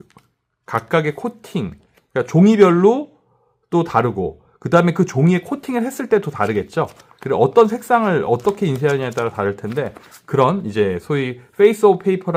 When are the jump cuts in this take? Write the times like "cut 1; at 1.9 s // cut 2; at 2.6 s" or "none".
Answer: none